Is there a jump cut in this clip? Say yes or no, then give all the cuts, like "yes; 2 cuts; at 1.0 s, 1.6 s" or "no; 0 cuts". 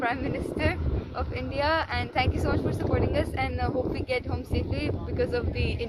no; 0 cuts